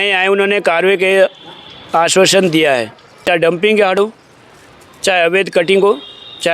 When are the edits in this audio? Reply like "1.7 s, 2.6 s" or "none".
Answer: 3.3 s